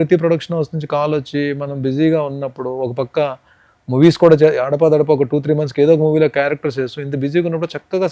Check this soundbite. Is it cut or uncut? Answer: uncut